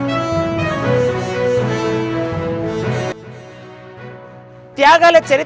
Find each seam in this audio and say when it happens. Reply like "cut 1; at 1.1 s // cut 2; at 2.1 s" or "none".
none